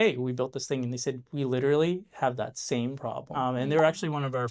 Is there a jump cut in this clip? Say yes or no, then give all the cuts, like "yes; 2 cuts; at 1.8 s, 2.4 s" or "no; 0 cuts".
yes; 1 cut; at 3.2 s